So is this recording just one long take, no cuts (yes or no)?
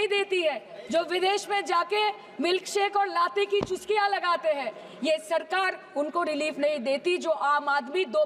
yes